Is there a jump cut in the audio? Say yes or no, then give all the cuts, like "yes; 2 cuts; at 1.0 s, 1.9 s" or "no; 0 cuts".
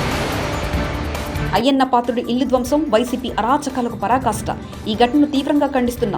yes; 1 cut; at 1.5 s